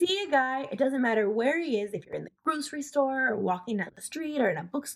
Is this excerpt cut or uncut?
uncut